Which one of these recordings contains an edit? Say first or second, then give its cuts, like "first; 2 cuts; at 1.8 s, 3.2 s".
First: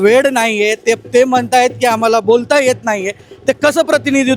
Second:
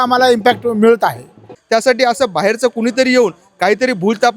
second; 1 cut; at 1.5 s